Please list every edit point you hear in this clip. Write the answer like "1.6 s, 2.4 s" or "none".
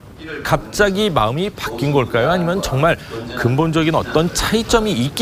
1.3 s